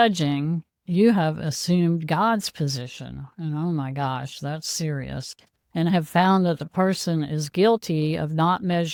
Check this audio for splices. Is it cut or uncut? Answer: uncut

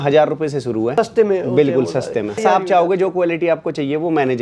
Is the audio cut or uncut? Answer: cut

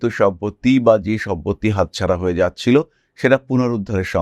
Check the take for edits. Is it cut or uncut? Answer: uncut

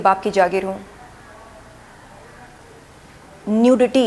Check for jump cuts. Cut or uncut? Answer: uncut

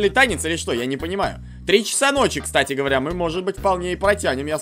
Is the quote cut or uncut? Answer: uncut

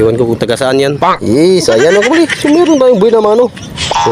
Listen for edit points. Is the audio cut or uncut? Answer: cut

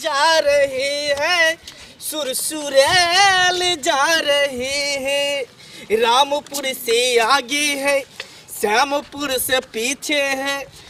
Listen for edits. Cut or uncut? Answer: uncut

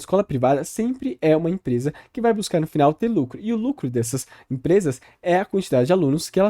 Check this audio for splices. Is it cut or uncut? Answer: uncut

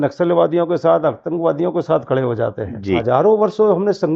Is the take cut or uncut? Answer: cut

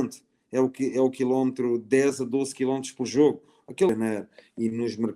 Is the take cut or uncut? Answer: cut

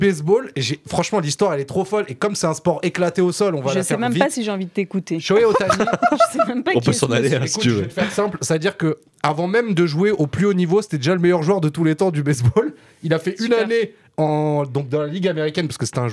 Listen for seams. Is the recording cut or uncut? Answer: uncut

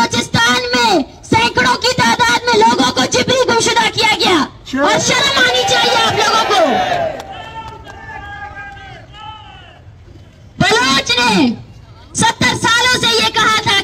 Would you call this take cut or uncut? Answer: uncut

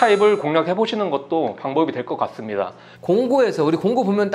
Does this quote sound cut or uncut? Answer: uncut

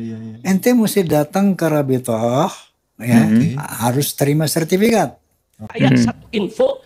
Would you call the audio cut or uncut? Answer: cut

